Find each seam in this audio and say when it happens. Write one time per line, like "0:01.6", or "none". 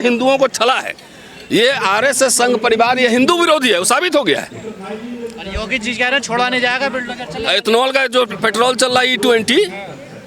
none